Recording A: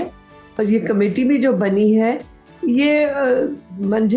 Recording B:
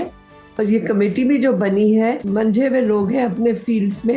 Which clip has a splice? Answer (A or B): B